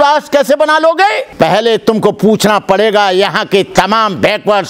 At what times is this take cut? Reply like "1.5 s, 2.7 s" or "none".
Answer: 1.2 s